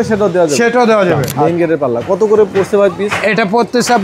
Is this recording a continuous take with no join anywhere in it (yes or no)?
no